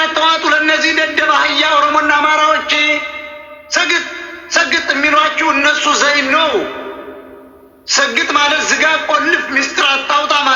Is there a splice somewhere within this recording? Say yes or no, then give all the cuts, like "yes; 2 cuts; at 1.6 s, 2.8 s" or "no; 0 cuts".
no; 0 cuts